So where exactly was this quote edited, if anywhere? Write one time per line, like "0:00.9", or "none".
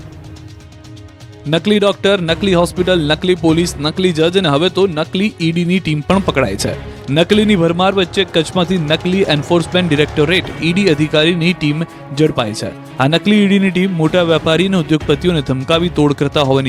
none

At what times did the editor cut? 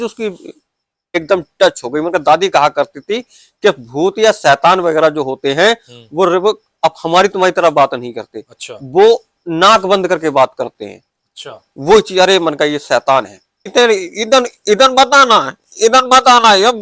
0:01.2
0:13.7

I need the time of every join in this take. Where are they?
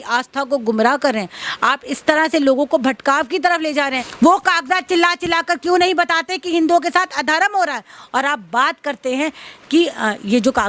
0:04.0

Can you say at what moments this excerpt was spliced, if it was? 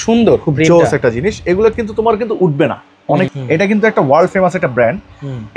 0:03.3

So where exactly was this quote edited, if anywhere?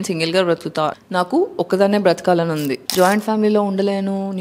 0:02.8

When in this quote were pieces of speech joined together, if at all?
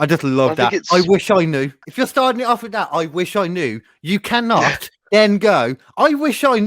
0:01.8

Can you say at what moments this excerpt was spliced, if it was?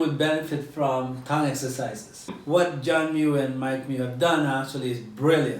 0:02.3

